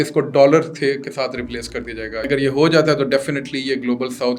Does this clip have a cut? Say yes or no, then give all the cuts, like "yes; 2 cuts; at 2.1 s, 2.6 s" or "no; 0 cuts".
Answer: yes; 1 cut; at 2.3 s